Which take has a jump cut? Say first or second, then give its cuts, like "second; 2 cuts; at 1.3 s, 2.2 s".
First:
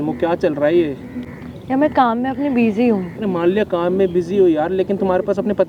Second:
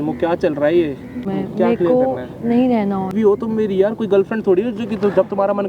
second; 2 cuts; at 1.2 s, 3.1 s